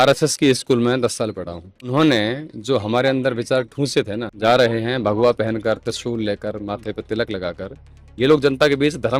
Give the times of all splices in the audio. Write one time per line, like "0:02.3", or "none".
0:04.4